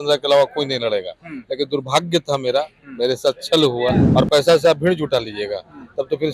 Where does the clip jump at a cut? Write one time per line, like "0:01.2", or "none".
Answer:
0:04.0